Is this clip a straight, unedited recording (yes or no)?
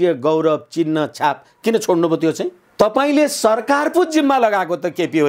no